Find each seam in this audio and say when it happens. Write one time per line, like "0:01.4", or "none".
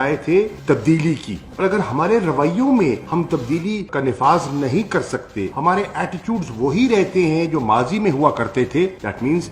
none